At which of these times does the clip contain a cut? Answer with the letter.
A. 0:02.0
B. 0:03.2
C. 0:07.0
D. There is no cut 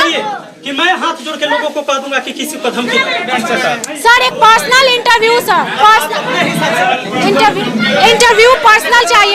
B